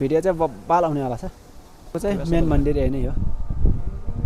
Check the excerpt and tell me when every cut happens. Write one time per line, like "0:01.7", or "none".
0:02.0